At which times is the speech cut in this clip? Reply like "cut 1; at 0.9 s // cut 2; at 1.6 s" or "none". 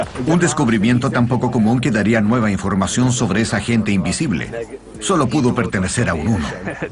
cut 1; at 4.0 s